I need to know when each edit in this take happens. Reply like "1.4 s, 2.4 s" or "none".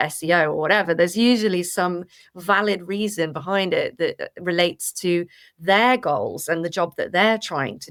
none